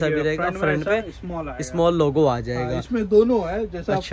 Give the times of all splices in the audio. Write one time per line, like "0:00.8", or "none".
none